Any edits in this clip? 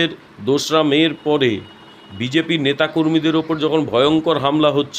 no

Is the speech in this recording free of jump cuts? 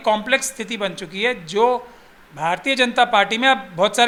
yes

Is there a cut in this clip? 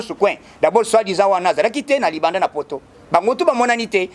no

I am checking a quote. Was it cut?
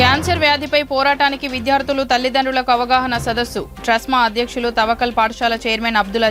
no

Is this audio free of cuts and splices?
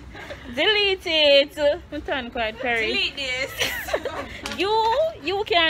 no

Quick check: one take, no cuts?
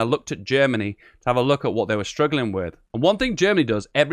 no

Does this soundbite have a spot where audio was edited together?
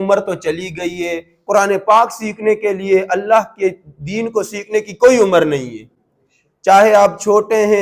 no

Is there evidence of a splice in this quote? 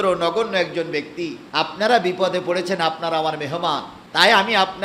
yes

